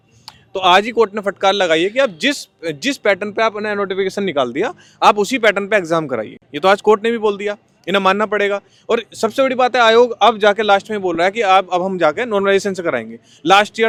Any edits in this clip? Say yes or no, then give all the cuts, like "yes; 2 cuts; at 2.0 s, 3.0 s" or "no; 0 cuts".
no; 0 cuts